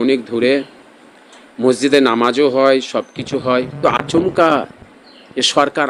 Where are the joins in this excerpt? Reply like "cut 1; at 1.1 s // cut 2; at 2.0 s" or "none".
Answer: cut 1; at 3.8 s